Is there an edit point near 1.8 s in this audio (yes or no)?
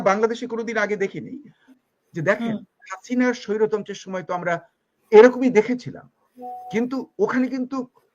yes